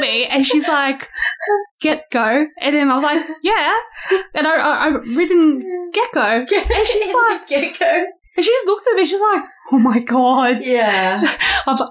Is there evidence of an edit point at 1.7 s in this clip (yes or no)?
no